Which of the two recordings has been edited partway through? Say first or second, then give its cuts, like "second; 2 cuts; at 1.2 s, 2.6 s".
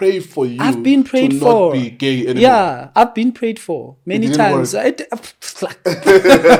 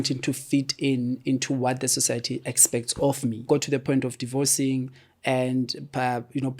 second; 1 cut; at 3.4 s